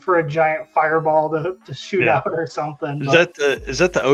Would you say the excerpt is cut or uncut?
uncut